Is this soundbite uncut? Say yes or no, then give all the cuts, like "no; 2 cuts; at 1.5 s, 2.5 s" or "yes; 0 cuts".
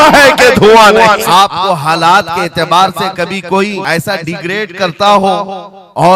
no; 2 cuts; at 1.2 s, 3.8 s